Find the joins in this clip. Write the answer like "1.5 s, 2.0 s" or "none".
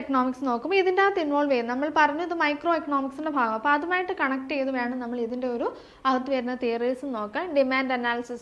none